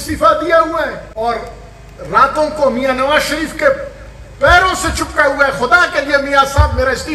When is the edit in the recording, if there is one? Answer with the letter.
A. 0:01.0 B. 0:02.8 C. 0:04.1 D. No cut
A